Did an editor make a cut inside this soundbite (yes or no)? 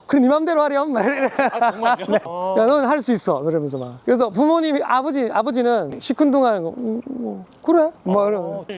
no